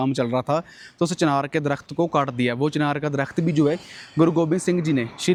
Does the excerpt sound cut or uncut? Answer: uncut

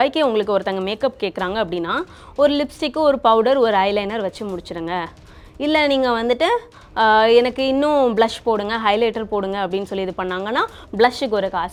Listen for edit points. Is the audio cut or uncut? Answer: uncut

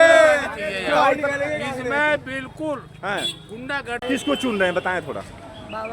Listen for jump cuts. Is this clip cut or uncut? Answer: cut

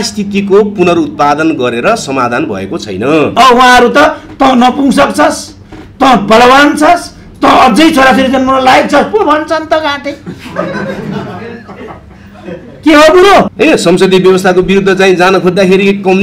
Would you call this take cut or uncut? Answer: cut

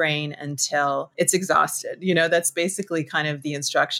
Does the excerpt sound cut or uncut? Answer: cut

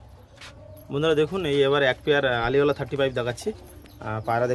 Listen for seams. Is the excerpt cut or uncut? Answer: uncut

